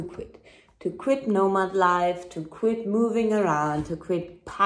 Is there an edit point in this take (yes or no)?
no